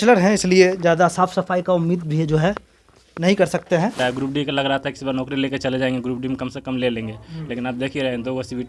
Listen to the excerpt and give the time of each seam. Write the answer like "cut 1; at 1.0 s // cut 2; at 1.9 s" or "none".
cut 1; at 4.0 s